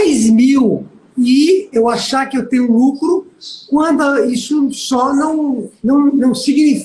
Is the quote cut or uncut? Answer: cut